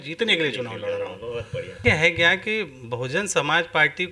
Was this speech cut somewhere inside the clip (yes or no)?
yes